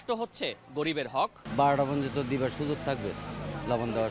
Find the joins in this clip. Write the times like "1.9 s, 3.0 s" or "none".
1.4 s